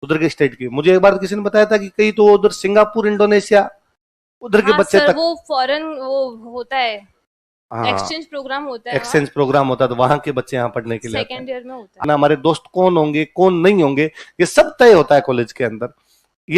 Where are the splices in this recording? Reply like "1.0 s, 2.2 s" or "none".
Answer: 12.0 s